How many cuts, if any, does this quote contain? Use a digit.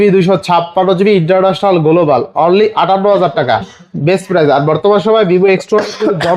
0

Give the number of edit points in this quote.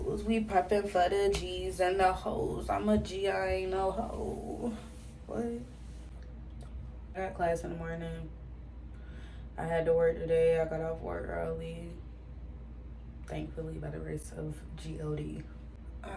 0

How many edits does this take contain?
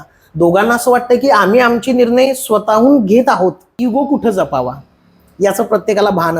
1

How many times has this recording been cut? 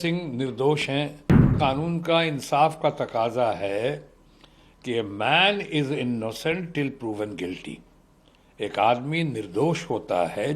1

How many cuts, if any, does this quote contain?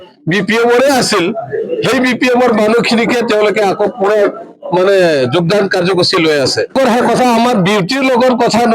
1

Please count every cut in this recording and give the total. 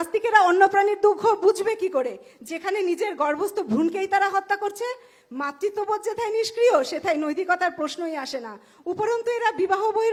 0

